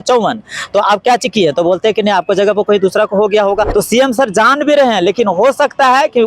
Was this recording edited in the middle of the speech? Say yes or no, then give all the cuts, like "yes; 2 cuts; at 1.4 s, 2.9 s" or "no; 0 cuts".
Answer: yes; 1 cut; at 3.7 s